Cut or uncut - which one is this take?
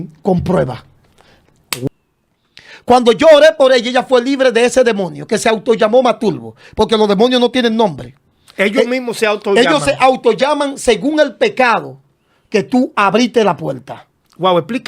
cut